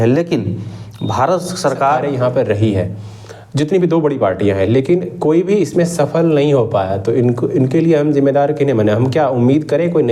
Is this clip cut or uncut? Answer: cut